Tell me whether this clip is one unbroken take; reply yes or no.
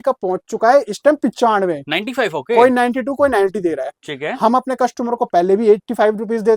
yes